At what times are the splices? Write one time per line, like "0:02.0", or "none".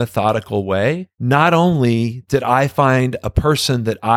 0:01.1

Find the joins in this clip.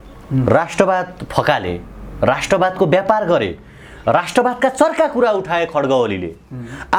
none

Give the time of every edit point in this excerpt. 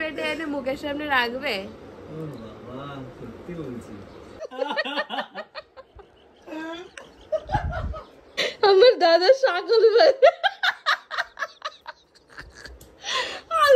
0:04.4
0:08.5

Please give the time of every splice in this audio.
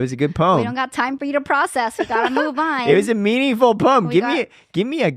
none

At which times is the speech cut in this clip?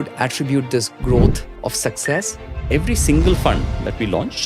0:01.5
0:02.5

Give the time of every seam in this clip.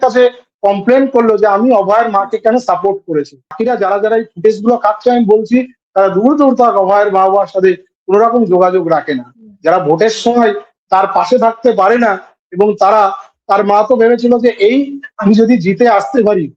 0:03.6

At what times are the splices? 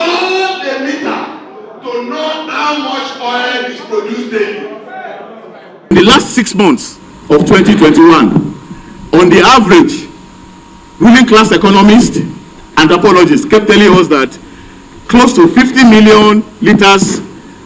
0:05.9

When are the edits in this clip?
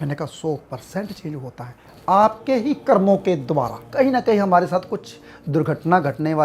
0:03.9

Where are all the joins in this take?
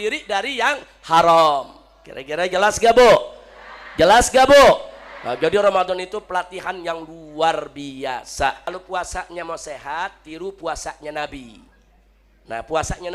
0:08.7

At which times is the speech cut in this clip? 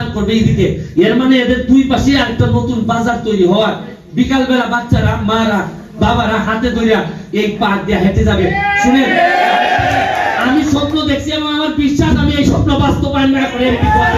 none

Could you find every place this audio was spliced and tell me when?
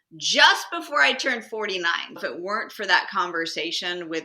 0:02.2

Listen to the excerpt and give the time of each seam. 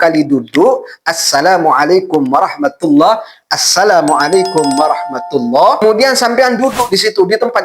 0:05.8

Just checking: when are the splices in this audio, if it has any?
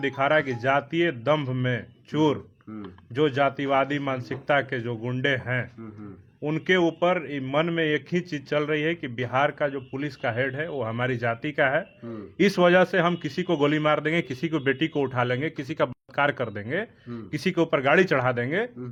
none

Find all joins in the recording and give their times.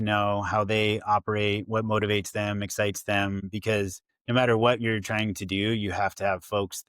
0:03.7

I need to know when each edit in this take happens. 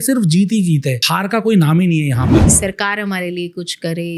0:01.0
0:02.5

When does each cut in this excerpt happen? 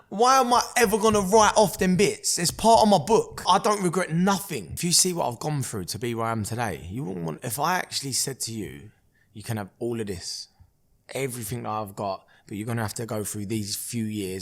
0:03.4
0:04.7

